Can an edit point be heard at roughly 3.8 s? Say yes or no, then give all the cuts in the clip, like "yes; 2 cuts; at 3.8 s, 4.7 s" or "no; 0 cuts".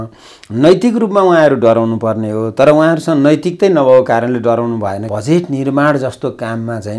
no; 1 cut; at 5.1 s